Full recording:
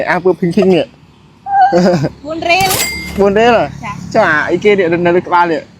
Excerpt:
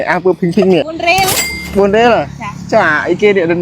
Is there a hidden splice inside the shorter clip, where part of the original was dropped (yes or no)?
yes